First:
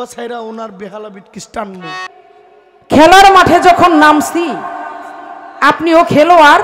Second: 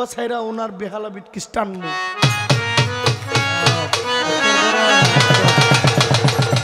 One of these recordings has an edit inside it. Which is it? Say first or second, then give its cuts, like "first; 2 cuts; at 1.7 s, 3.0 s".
first; 1 cut; at 2.1 s